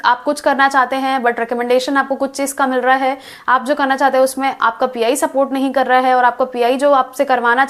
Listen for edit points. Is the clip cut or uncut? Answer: uncut